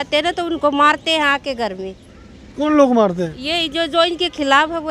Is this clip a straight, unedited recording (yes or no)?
yes